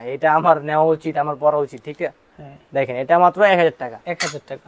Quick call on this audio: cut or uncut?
uncut